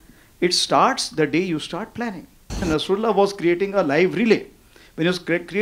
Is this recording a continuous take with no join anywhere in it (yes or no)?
no